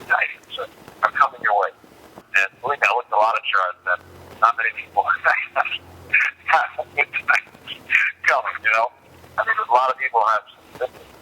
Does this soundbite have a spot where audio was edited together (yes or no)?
yes